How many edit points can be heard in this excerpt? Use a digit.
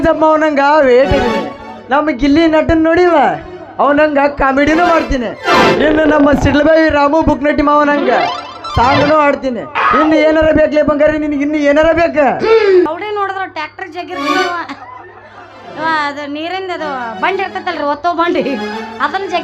1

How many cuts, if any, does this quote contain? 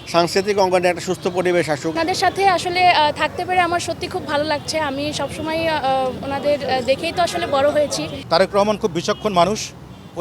2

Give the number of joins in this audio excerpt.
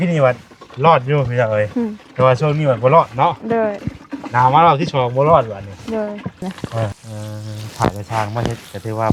1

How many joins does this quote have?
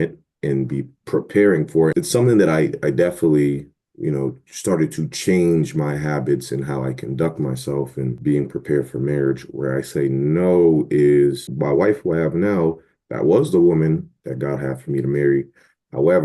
3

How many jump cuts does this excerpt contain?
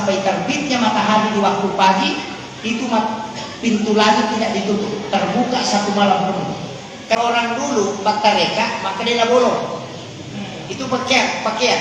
1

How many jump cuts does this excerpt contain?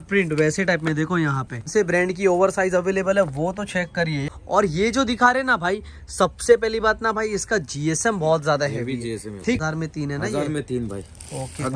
3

